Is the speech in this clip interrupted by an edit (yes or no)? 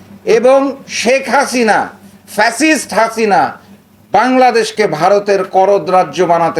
no